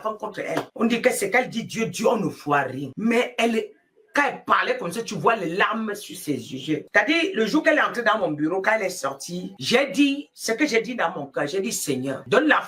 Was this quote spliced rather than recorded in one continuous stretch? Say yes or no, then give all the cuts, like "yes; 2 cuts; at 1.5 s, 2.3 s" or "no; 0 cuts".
no; 0 cuts